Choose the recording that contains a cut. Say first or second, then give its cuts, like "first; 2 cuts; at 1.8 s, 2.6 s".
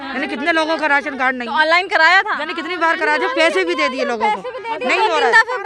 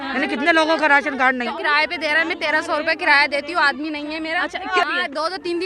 second; 2 cuts; at 1.5 s, 4.8 s